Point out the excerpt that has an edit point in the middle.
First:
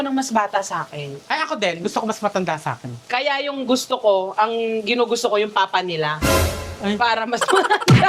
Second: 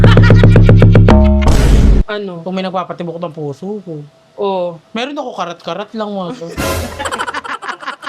second; 1 cut; at 2.0 s

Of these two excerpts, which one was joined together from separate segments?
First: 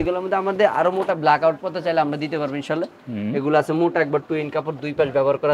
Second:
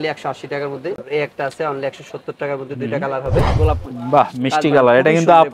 second; 2 cuts; at 1.0 s, 3.5 s

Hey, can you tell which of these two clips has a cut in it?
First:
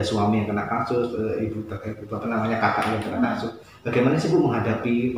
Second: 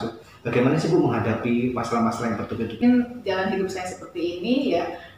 second; 1 cut; at 2.8 s

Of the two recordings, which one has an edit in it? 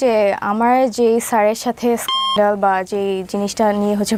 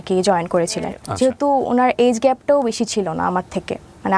second; 1 cut; at 1.0 s

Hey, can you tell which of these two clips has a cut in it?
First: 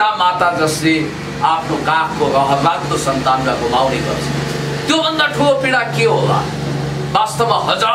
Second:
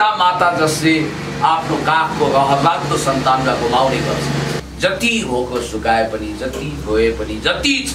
second; 1 cut; at 4.6 s

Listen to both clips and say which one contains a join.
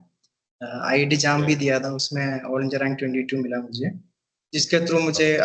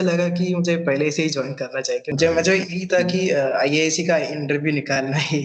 second; 1 cut; at 2.1 s

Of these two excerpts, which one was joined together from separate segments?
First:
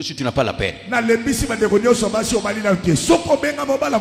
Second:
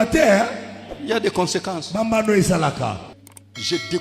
second; 1 cut; at 3.0 s

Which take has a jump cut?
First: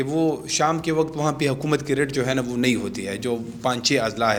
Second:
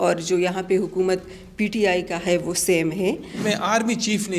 second; 1 cut; at 3.4 s

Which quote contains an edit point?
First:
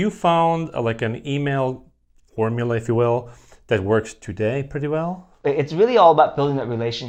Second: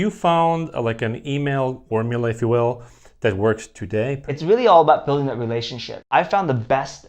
second; 3 cuts; at 1.8 s, 4.3 s, 6.0 s

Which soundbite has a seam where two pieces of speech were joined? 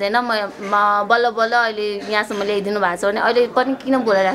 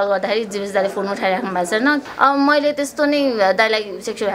second; 1 cut; at 2.1 s

